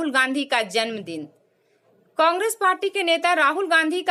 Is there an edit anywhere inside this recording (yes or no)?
no